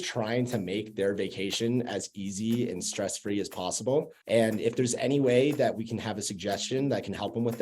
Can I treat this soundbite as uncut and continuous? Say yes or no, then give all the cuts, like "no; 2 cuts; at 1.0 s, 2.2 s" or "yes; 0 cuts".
no; 1 cut; at 4.2 s